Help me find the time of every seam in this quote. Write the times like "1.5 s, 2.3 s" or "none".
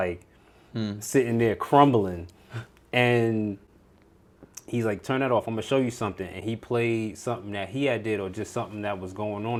none